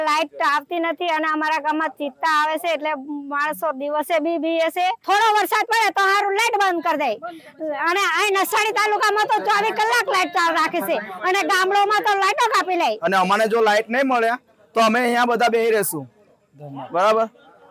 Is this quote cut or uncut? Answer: cut